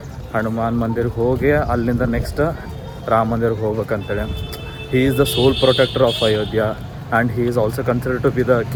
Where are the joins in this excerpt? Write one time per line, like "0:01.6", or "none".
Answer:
none

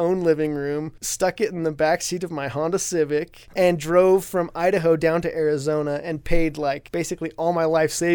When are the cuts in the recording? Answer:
0:01.0
0:03.4
0:06.8

